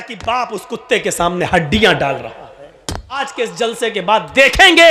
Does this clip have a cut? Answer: yes; 1 cut; at 3.2 s

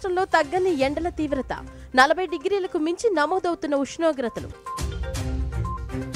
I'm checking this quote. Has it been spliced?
no; 0 cuts

